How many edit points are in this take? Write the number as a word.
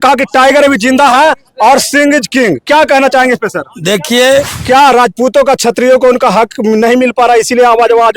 one